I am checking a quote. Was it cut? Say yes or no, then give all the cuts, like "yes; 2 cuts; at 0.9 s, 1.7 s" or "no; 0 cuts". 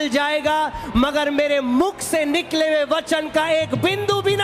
no; 0 cuts